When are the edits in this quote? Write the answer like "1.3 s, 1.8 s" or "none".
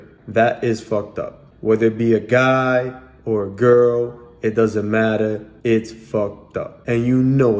6.7 s